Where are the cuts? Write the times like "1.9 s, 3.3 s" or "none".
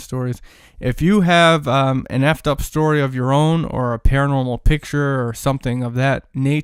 none